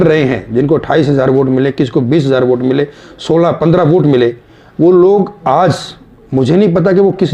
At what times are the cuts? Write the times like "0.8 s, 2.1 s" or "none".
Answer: none